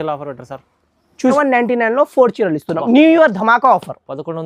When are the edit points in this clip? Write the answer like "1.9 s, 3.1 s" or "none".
1.3 s